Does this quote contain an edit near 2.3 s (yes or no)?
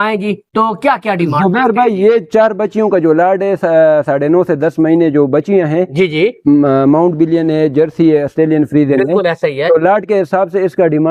no